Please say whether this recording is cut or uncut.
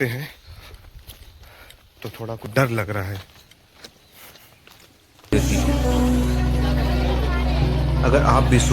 cut